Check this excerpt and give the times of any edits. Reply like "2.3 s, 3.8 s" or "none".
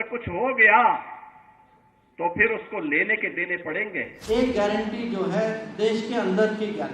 4.1 s